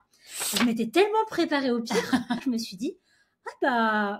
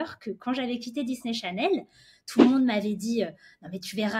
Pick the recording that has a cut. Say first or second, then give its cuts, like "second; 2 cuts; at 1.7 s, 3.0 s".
first; 1 cut; at 2.4 s